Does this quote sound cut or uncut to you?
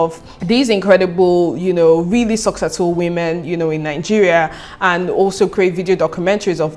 uncut